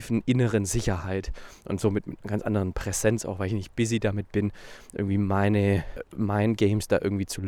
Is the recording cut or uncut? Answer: cut